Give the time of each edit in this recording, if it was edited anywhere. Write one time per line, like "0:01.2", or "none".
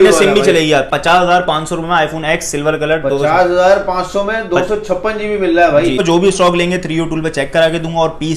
0:00.9
0:06.0